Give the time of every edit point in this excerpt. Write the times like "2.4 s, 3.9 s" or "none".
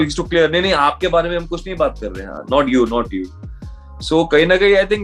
none